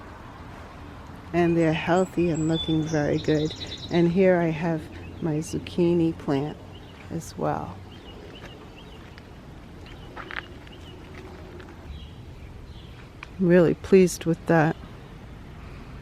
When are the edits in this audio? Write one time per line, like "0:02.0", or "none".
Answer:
0:11.9